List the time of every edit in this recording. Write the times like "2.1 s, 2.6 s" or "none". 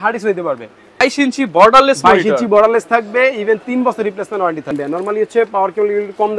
1.0 s, 4.7 s